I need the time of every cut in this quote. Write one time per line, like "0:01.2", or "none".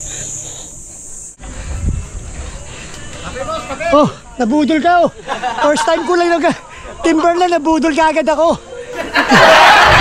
0:01.4
0:09.1